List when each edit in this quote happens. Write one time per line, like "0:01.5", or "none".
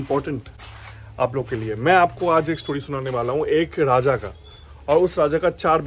none